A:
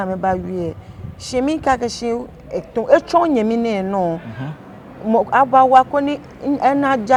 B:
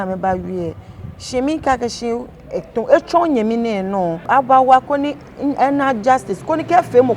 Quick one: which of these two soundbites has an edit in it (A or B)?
B